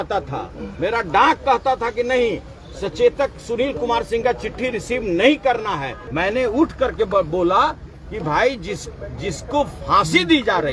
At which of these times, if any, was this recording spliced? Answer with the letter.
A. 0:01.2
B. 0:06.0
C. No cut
B